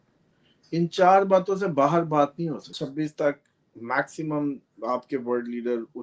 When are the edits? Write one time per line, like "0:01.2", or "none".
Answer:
0:02.7